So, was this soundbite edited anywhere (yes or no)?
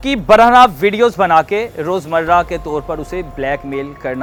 no